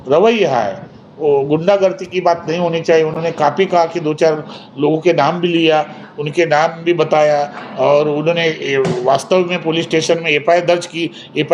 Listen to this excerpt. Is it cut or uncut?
uncut